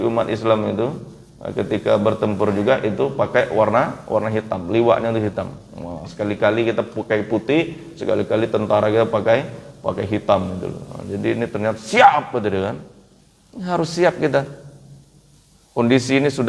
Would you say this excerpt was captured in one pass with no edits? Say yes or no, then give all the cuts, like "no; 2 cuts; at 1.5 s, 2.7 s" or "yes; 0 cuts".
yes; 0 cuts